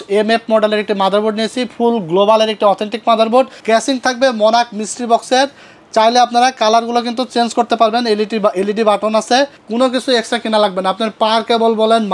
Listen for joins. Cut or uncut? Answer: cut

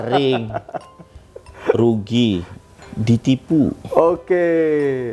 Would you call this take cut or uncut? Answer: uncut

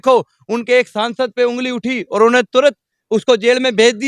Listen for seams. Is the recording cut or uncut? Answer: uncut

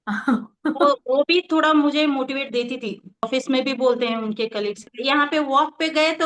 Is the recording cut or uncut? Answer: cut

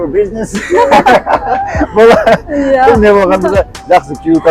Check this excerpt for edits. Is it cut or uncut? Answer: uncut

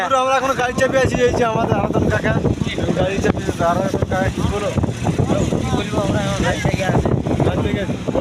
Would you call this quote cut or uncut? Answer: uncut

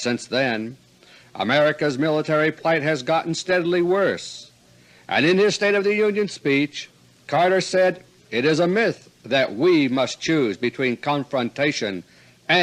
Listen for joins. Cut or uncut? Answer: uncut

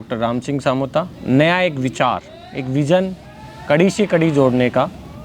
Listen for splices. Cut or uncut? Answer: cut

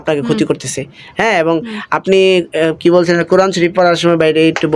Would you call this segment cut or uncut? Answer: uncut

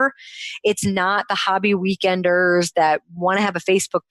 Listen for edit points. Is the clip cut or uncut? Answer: uncut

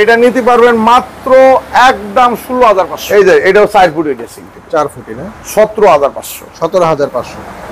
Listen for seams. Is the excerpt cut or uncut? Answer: cut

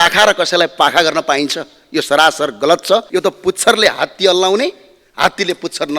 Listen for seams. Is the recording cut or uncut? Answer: cut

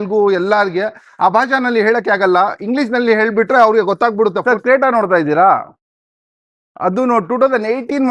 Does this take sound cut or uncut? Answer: cut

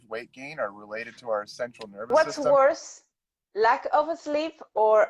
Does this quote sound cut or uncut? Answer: cut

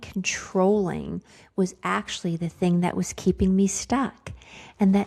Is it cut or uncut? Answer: uncut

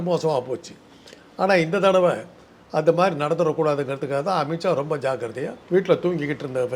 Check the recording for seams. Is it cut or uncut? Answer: cut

